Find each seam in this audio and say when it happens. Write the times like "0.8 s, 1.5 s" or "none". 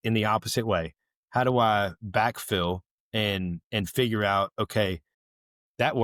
none